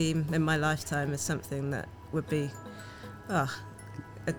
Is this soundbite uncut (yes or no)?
yes